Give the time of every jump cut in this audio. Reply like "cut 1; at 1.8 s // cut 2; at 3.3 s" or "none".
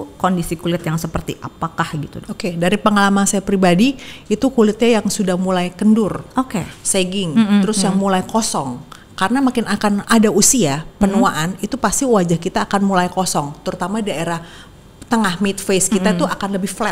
none